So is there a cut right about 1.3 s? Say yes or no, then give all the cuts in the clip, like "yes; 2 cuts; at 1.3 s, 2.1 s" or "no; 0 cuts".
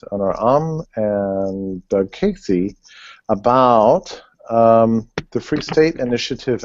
no; 0 cuts